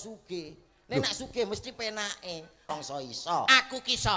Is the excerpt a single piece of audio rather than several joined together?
no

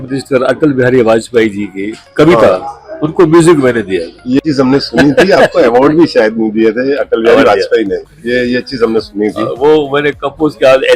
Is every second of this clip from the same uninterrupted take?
no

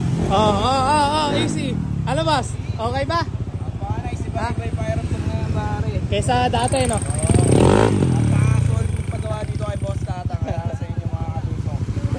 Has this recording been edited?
no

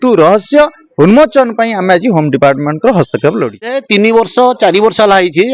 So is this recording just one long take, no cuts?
no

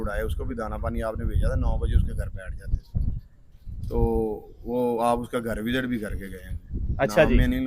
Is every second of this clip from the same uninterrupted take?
yes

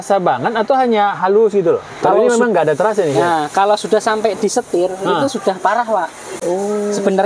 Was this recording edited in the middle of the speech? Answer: no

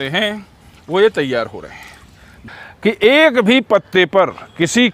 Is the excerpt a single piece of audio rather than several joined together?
no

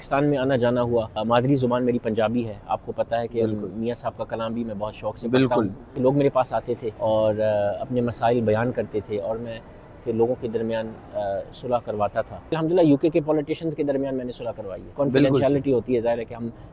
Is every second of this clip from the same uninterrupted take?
no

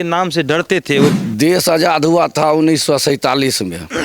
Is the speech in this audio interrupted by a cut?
yes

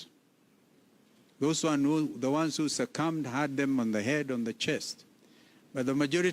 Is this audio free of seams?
yes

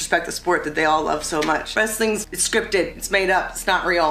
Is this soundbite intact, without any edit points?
no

